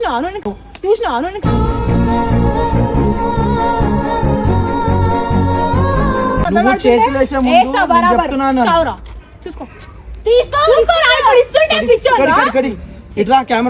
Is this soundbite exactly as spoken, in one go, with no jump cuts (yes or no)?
yes